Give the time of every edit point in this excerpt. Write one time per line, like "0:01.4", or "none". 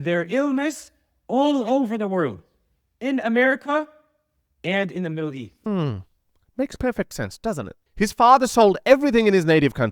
0:05.5
0:07.7